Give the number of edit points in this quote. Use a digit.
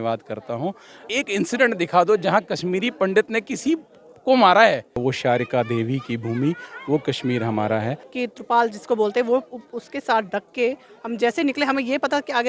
3